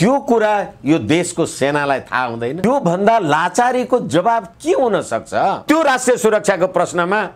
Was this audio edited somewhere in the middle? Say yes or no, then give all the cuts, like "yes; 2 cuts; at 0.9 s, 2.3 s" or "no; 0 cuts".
yes; 2 cuts; at 2.6 s, 5.6 s